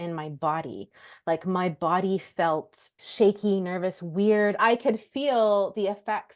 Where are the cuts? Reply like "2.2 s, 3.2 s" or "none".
3.0 s, 4.6 s